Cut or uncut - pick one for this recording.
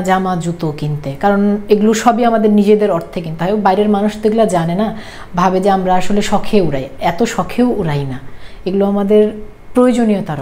uncut